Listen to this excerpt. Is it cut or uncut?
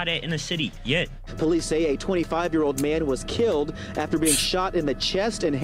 uncut